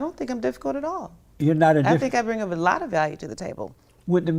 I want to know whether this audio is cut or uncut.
uncut